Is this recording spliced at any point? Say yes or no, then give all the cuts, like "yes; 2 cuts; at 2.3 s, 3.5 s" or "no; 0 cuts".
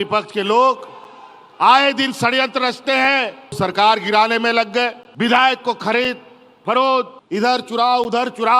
yes; 3 cuts; at 3.6 s, 5.0 s, 7.2 s